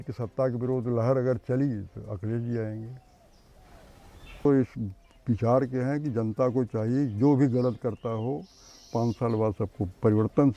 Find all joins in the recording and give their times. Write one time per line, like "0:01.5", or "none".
0:04.4